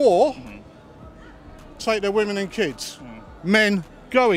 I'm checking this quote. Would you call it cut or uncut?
uncut